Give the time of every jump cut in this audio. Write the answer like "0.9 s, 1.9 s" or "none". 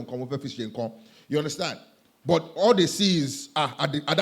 none